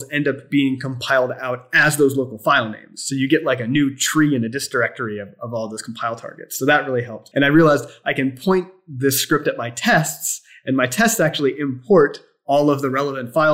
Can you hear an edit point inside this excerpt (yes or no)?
yes